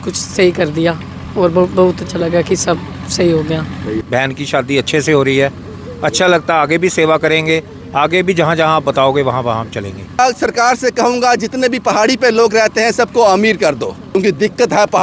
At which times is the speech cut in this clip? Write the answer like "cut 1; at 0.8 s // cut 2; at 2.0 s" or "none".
cut 1; at 4.0 s // cut 2; at 10.2 s // cut 3; at 14.0 s